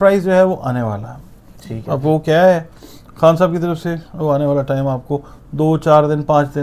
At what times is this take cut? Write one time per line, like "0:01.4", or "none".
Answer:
none

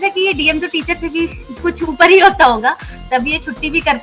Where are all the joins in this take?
none

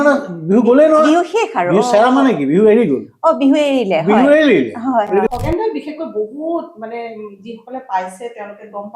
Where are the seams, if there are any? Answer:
0:05.3

